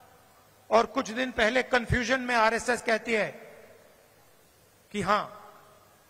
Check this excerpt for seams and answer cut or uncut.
uncut